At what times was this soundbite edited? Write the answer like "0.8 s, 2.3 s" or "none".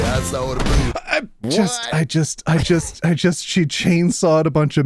none